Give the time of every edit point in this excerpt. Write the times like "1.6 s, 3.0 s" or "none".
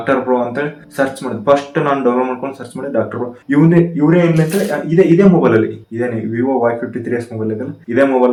none